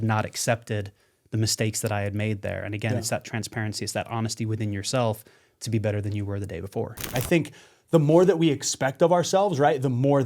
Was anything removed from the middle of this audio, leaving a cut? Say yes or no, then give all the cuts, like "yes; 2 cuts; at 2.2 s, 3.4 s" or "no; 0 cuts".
yes; 1 cut; at 7.1 s